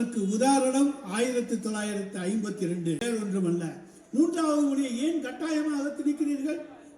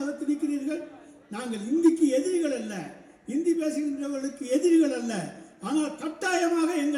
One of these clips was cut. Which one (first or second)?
first